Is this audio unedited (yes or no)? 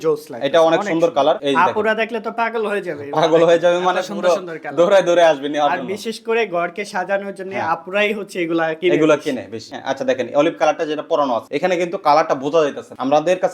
yes